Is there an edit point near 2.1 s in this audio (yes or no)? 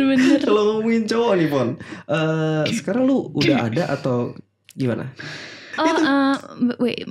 no